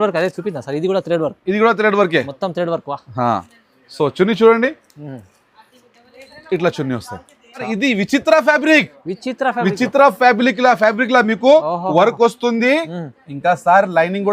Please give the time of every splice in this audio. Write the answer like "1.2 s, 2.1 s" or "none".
7.6 s